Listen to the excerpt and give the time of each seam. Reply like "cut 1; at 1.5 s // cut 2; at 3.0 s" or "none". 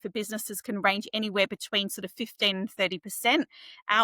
none

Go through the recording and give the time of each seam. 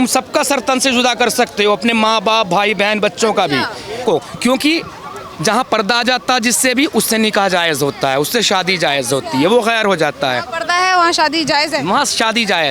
cut 1; at 4.0 s

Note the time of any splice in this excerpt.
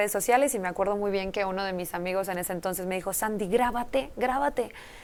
none

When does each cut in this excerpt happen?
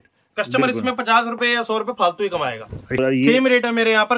cut 1; at 3.0 s

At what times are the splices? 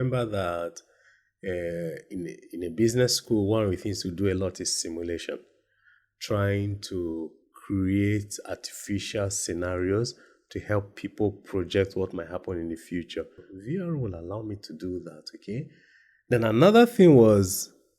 cut 1; at 13.5 s

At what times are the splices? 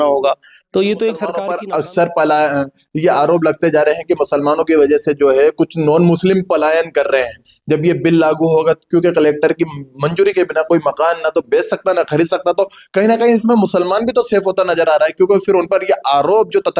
cut 1; at 1.4 s

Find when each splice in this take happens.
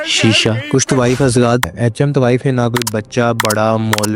cut 1; at 1.7 s

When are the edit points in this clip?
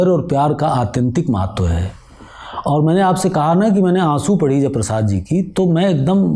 none

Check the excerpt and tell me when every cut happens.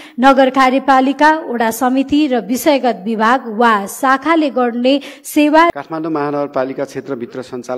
cut 1; at 5.7 s

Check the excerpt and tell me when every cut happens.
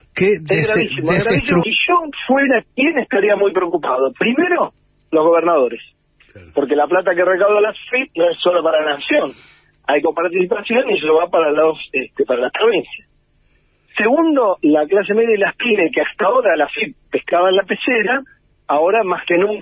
cut 1; at 1.7 s

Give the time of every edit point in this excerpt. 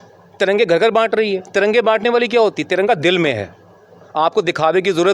none

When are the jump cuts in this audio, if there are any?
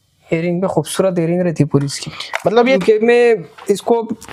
cut 1; at 2.6 s

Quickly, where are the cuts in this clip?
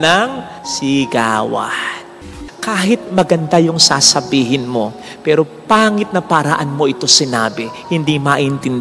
cut 1; at 2.2 s

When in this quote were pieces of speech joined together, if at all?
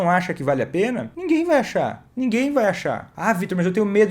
cut 1; at 1.1 s // cut 2; at 2.0 s // cut 3; at 3.1 s

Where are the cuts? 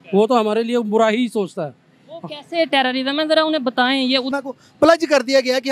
cut 1; at 4.3 s

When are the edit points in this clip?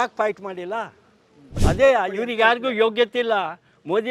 cut 1; at 1.5 s

